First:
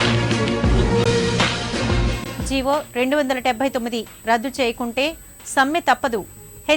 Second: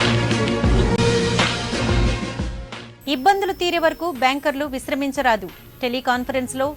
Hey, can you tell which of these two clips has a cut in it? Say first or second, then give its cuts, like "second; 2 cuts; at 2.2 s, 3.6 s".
first; 1 cut; at 0.9 s